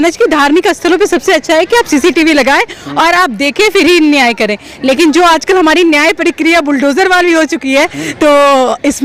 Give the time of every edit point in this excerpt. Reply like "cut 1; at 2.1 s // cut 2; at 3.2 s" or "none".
none